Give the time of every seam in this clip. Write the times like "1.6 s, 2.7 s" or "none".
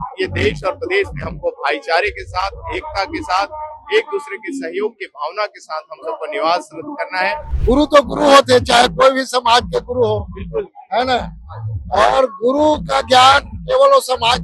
7.5 s